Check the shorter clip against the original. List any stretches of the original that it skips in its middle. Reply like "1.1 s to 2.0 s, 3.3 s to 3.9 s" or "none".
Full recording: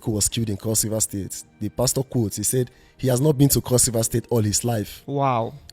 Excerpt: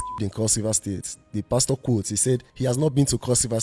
2.8 s to 2.9 s